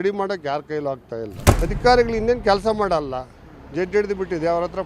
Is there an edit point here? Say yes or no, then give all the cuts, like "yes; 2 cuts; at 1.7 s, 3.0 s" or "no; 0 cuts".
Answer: yes; 1 cut; at 1.4 s